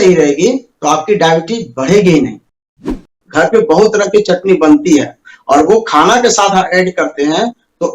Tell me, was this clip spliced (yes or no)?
yes